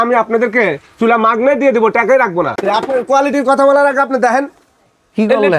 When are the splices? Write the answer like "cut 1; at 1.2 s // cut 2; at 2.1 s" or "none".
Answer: cut 1; at 2.6 s